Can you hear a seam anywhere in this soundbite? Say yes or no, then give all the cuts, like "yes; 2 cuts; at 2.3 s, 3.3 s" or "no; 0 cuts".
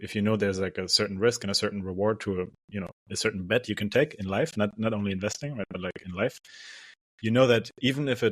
no; 0 cuts